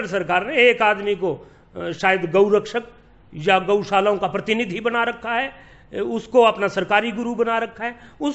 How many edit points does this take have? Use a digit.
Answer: 0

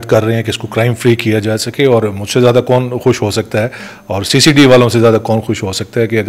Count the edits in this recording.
0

